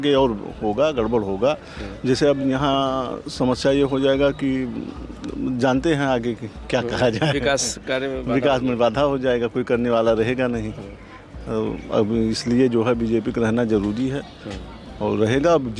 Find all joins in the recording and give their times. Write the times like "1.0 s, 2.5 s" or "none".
none